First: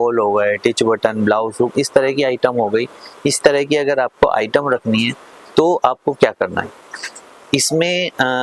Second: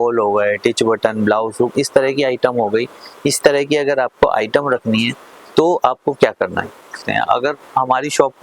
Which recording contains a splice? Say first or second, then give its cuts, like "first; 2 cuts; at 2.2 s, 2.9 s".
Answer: second; 1 cut; at 7.0 s